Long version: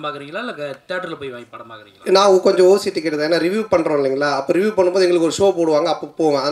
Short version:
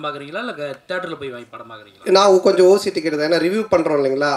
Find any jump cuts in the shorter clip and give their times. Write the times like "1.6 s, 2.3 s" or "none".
none

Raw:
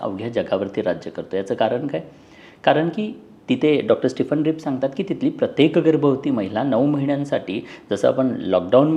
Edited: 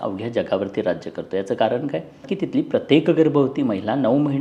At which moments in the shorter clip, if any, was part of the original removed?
2.3 s

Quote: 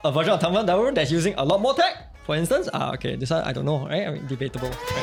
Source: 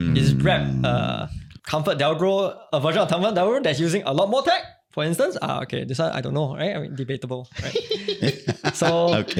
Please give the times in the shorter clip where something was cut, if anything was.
none

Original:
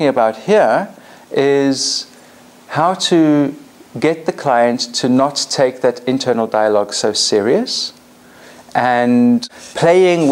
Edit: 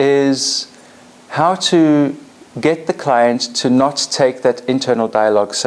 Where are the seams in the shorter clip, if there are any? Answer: none

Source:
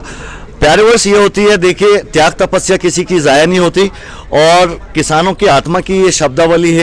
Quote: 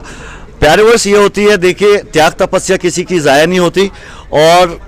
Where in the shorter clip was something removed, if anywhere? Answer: none

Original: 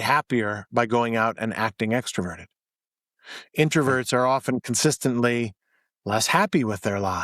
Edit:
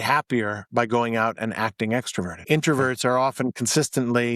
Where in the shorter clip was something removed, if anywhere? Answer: 2.4 s

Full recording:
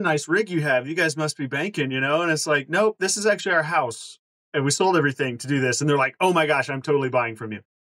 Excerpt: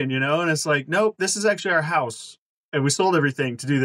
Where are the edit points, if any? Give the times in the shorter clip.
none

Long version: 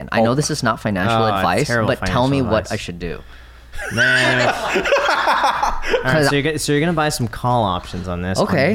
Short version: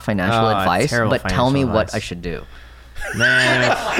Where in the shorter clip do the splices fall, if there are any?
none

